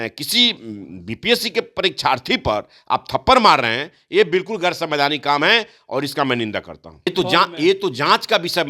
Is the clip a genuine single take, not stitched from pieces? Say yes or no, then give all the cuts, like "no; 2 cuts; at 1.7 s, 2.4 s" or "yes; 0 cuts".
no; 1 cut; at 7.1 s